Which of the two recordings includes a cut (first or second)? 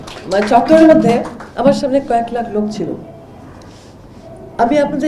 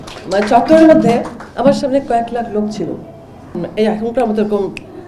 second